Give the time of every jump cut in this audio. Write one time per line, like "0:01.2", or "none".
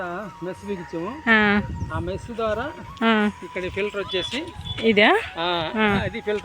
none